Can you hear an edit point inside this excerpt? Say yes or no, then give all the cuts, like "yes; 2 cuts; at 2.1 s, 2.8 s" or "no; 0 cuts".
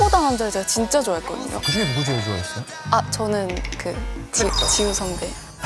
yes; 1 cut; at 1.5 s